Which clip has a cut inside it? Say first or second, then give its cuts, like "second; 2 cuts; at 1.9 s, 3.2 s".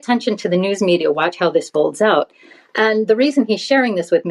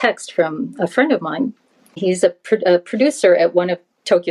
second; 1 cut; at 1.9 s